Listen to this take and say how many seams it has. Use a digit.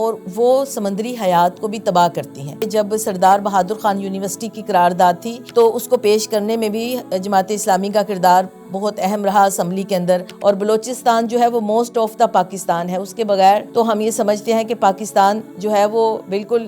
5